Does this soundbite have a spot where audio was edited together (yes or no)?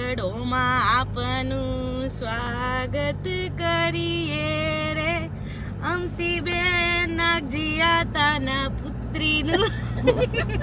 no